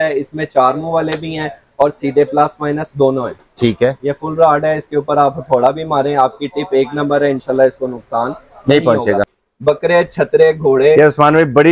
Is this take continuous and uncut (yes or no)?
no